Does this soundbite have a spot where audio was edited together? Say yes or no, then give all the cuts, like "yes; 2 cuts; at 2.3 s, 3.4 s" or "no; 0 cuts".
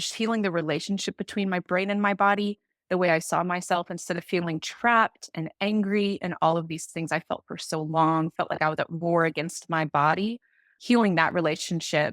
yes; 1 cut; at 10.7 s